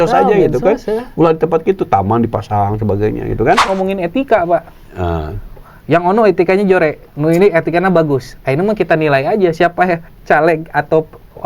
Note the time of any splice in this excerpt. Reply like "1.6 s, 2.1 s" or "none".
3.6 s